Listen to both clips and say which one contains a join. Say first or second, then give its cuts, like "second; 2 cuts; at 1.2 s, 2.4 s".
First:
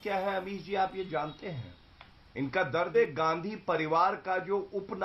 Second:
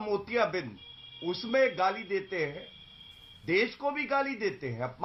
first; 1 cut; at 2.9 s